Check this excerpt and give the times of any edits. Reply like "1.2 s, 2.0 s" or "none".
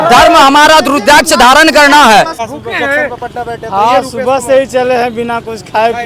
2.4 s